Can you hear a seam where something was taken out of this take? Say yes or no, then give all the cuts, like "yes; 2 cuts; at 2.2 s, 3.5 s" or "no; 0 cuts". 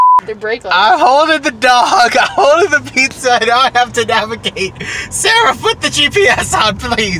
no; 0 cuts